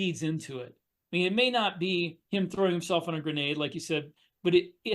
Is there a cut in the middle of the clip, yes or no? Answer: yes